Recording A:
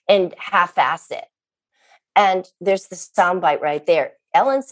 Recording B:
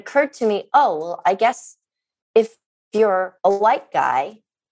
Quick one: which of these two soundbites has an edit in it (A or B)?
B